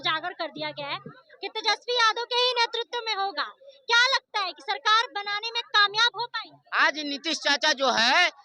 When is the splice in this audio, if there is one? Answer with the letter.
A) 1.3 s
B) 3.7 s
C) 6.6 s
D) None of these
C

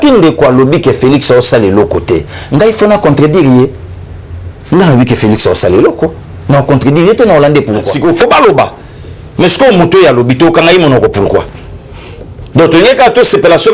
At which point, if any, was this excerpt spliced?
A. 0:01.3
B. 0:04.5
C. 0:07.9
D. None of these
C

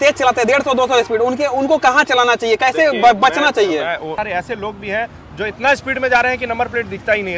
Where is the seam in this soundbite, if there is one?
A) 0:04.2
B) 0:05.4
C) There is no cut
A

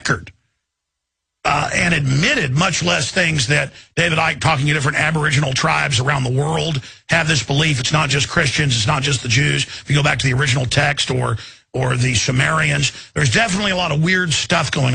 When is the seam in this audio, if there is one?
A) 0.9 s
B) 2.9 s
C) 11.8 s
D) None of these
D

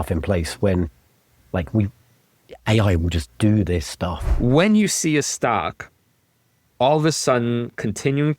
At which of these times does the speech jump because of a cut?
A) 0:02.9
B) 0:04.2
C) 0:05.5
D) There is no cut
B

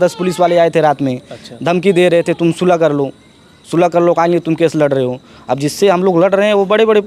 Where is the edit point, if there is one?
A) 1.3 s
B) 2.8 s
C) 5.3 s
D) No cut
D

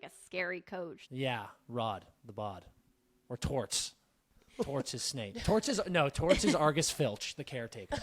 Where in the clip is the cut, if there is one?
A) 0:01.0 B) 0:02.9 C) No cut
A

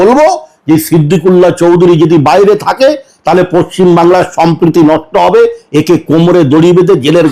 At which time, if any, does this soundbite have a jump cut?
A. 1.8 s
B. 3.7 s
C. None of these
C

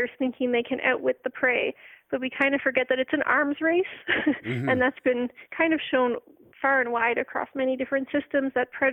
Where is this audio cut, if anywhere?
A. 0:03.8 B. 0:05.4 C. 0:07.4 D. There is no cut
B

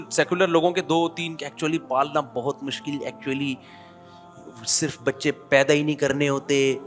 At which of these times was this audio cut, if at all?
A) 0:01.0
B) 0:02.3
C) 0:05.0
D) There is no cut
D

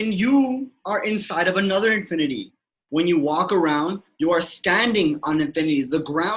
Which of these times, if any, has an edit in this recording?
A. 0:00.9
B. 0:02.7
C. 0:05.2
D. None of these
B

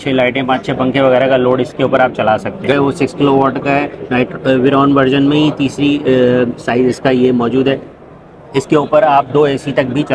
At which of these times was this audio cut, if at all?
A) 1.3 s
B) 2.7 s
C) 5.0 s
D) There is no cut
B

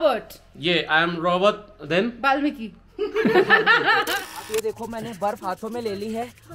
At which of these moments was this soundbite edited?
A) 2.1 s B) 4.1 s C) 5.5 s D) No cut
B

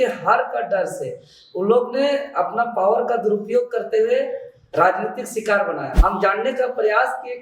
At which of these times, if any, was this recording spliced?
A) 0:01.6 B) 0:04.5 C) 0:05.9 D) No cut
C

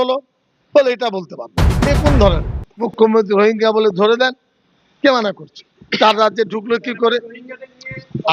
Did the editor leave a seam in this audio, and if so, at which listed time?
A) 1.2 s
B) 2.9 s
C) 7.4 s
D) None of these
B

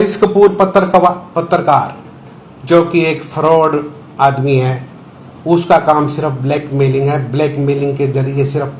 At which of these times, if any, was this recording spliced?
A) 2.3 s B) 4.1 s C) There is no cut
C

